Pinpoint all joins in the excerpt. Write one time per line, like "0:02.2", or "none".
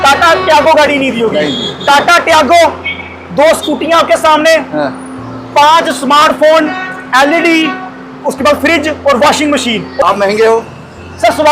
0:09.9